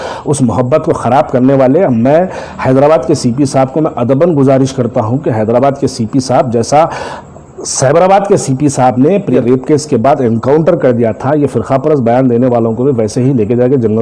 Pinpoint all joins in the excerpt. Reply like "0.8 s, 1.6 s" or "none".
9.4 s

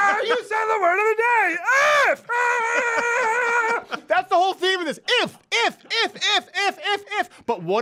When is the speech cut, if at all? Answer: none

